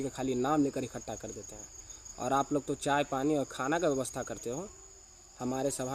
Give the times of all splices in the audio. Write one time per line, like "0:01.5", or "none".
none